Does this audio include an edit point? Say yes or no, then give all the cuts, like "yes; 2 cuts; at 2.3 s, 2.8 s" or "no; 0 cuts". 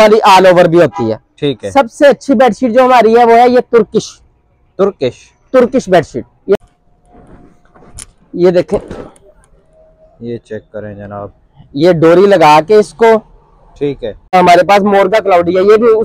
yes; 2 cuts; at 6.6 s, 14.3 s